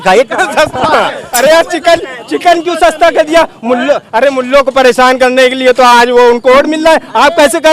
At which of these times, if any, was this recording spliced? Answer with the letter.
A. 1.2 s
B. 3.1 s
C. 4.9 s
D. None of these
A